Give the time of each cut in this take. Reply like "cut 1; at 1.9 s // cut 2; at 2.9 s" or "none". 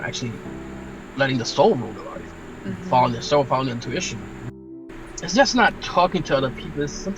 cut 1; at 4.6 s